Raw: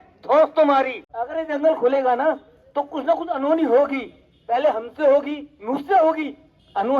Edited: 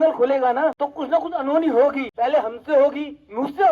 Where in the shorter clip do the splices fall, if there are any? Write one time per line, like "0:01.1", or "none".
0:00.9
0:02.1